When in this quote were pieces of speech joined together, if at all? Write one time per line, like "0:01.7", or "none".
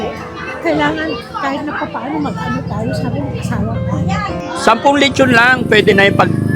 0:04.4